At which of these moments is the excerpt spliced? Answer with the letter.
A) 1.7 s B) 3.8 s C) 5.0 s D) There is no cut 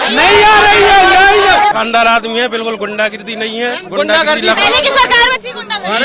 A